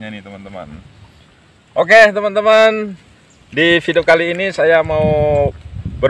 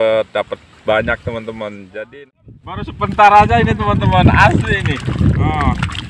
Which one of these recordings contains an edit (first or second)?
second